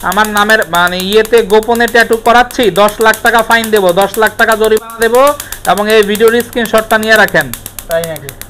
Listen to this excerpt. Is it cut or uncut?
uncut